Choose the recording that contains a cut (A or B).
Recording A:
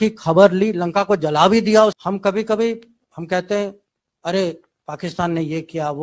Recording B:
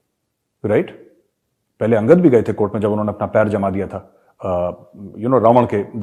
A